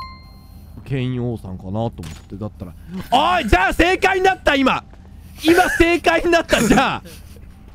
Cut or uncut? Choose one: uncut